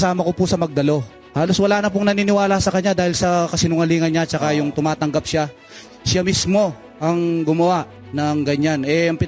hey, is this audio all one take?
no; 2 cuts; at 1.2 s, 8.0 s

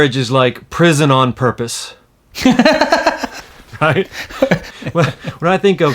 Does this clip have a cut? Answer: yes; 1 cut; at 4.7 s

